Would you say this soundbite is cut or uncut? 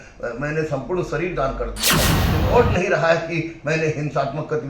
cut